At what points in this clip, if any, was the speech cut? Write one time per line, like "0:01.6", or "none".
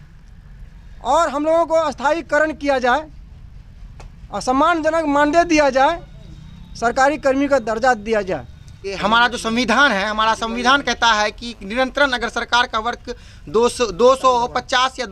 0:09.0